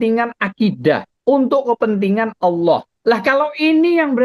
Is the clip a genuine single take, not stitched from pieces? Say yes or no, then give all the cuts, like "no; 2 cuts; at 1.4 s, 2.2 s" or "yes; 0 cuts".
no; 2 cuts; at 1.1 s, 2.9 s